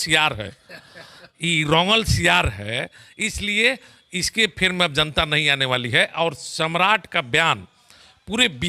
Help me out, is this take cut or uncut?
uncut